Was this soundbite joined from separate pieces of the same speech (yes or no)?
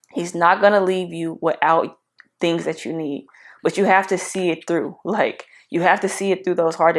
no